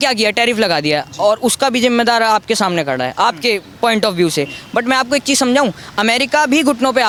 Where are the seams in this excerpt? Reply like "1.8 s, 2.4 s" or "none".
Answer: none

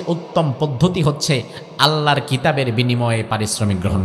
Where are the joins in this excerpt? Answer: none

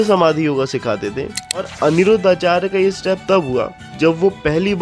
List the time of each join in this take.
1.7 s

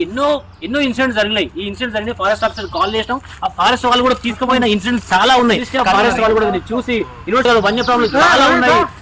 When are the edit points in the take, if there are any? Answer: 7.4 s

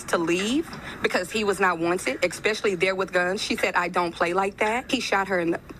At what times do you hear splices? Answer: 4.8 s

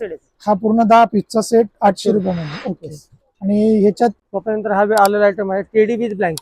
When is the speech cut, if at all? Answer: none

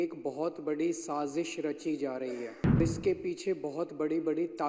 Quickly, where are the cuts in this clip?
2.8 s

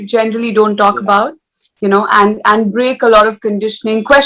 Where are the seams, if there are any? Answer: none

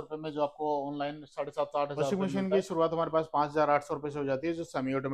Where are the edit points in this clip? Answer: 2.1 s

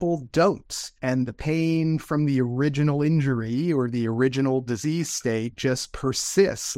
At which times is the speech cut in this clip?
none

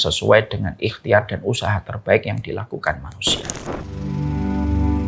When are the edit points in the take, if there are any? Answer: 3.9 s

